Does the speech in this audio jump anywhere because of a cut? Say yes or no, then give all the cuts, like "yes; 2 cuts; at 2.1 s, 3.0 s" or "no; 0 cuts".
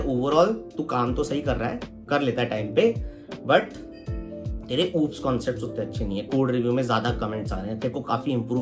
no; 0 cuts